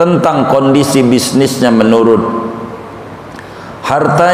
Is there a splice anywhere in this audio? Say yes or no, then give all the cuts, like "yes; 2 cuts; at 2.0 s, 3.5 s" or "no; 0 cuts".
no; 0 cuts